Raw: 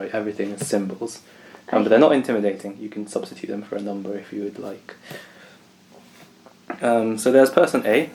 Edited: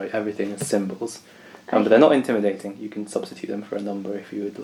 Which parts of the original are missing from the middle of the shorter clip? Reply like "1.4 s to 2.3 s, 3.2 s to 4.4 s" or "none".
none